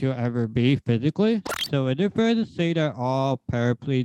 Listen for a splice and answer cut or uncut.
cut